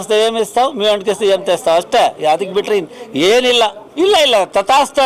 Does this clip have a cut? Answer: yes; 1 cut; at 3.8 s

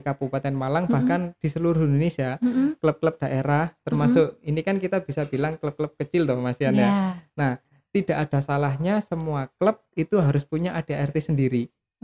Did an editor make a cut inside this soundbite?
no; 0 cuts

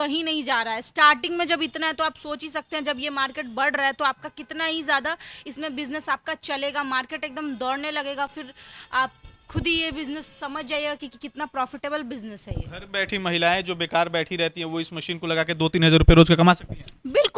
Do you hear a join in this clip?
no; 0 cuts

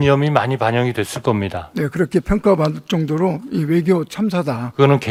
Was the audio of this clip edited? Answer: no; 0 cuts

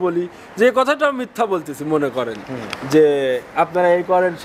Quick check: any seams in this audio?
no; 0 cuts

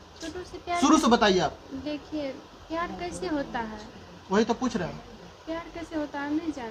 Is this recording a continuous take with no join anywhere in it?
yes; 0 cuts

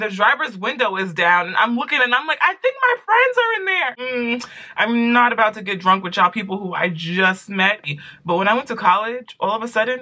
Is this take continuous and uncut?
no; 2 cuts; at 4.0 s, 7.9 s

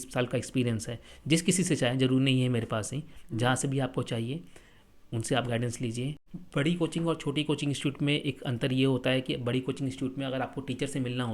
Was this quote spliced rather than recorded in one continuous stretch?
yes; 1 cut; at 6.3 s

